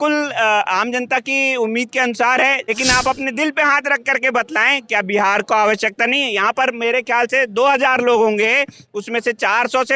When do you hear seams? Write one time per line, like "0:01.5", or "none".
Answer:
0:02.6